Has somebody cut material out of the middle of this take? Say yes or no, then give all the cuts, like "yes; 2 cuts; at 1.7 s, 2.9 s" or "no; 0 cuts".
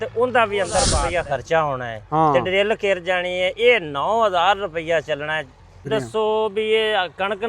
yes; 2 cuts; at 1.0 s, 5.9 s